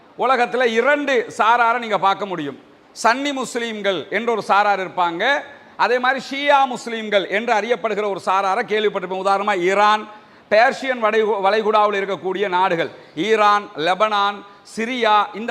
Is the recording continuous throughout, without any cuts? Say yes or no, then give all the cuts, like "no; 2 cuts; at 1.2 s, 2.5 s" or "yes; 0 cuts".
yes; 0 cuts